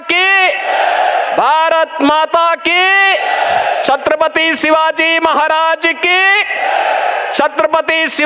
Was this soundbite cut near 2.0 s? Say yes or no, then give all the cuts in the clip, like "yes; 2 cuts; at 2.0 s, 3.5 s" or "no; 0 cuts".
no; 0 cuts